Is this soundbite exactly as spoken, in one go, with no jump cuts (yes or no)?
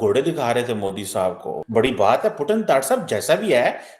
no